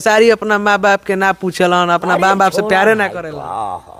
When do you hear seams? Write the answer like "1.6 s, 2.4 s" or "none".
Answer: none